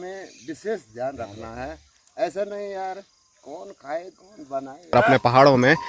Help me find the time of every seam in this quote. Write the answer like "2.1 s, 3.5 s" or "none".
4.9 s